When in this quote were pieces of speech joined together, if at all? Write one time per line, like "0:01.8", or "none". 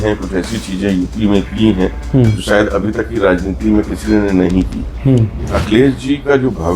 0:05.6